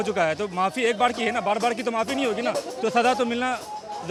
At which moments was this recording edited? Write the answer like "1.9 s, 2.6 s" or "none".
none